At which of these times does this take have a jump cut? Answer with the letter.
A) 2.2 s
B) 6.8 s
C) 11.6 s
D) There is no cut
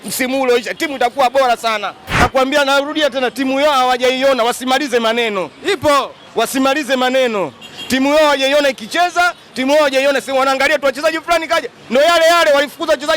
A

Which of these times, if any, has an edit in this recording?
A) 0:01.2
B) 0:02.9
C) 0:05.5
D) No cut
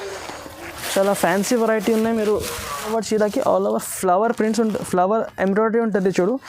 B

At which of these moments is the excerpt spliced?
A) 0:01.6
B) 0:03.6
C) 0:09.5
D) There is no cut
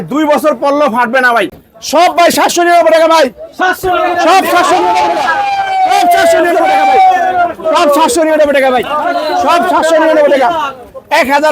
A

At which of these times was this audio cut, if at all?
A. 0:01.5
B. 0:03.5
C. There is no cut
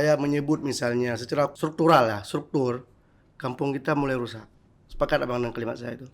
A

